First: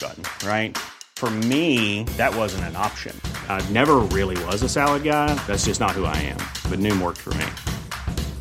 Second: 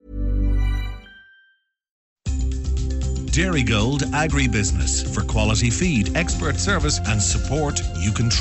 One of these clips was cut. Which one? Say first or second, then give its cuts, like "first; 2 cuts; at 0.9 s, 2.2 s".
second; 1 cut; at 2.1 s